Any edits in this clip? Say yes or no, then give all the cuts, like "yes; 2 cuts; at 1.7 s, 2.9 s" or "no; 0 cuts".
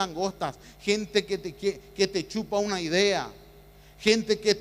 yes; 1 cut; at 2.0 s